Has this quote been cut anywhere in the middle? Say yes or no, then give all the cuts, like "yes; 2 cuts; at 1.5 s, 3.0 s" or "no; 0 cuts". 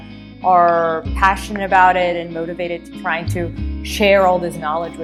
no; 0 cuts